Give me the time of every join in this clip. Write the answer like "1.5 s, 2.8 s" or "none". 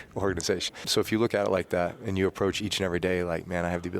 0.8 s, 2.6 s